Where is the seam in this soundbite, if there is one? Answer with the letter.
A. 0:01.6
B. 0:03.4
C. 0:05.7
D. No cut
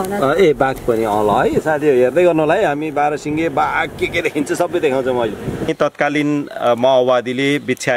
C